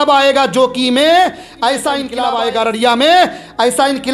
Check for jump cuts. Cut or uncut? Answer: cut